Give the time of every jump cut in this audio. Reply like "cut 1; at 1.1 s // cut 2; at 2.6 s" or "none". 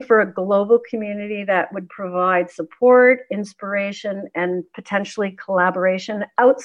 none